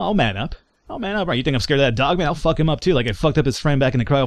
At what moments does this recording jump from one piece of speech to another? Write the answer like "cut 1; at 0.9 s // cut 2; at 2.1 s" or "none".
none